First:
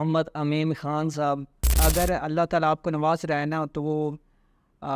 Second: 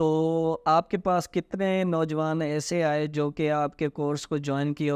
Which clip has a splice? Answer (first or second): first